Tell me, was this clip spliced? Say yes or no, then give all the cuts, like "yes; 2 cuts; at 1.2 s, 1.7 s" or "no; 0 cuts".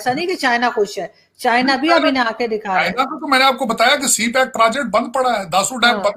no; 0 cuts